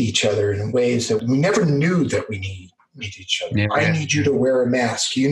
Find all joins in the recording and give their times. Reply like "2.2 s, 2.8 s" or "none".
1.2 s